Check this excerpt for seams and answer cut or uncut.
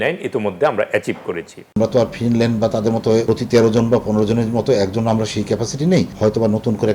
cut